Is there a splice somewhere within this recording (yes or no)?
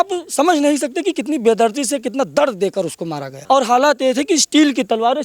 yes